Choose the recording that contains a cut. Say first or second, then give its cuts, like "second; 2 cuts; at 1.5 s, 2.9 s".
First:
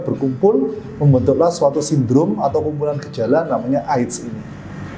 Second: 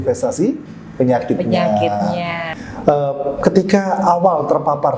second; 1 cut; at 2.4 s